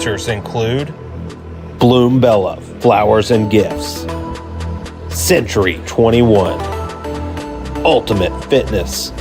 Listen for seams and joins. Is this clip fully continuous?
no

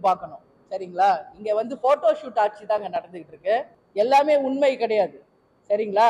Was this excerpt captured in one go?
no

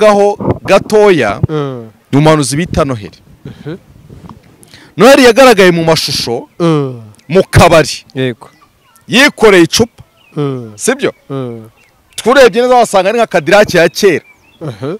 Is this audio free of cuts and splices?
yes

